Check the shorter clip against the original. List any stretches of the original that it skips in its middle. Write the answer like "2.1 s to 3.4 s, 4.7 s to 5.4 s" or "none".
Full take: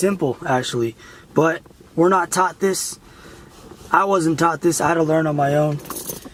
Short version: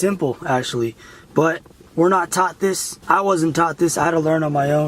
2.9 s to 3.7 s